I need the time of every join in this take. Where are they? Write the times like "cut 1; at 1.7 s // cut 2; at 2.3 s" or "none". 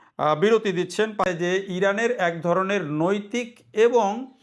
cut 1; at 1.2 s